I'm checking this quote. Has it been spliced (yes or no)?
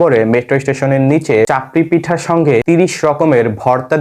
yes